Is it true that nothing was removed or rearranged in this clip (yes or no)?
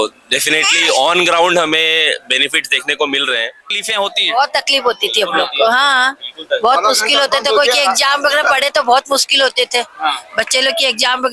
no